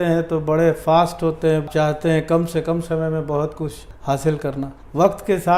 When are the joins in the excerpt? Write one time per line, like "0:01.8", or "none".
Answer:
0:01.7